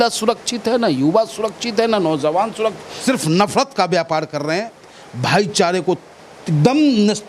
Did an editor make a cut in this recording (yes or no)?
yes